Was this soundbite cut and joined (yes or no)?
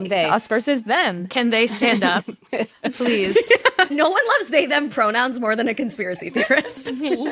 no